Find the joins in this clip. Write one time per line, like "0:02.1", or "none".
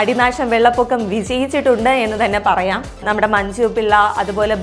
0:03.0